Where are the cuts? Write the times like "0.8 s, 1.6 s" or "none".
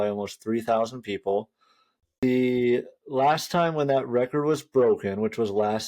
2.2 s